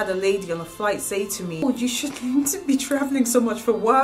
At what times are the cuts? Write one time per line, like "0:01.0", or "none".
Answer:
0:01.6